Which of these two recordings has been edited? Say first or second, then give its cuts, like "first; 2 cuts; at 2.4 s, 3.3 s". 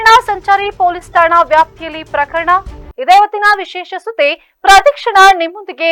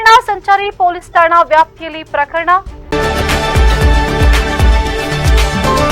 second; 1 cut; at 2.8 s